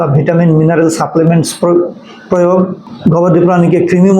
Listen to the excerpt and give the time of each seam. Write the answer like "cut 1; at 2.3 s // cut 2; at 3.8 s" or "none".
cut 1; at 2.8 s